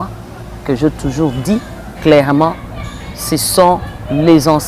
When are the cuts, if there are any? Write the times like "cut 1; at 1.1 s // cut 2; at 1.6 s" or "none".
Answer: none